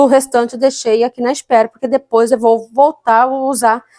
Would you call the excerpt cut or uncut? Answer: uncut